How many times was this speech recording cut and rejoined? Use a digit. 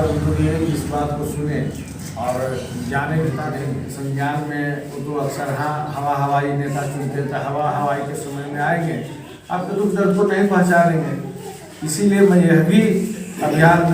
1